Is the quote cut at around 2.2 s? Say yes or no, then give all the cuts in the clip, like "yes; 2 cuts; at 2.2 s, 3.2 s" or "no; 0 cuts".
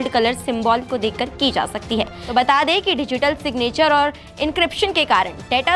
yes; 1 cut; at 2.2 s